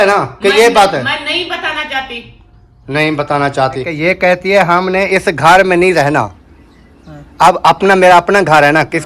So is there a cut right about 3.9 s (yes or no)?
yes